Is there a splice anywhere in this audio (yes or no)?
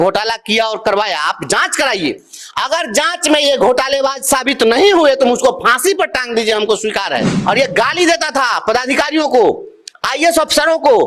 yes